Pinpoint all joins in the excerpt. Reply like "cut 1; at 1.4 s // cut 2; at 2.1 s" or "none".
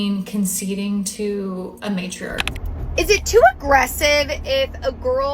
cut 1; at 2.5 s